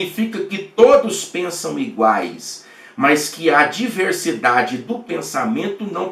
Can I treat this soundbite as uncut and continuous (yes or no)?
yes